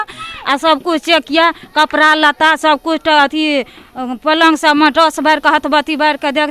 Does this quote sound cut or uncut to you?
uncut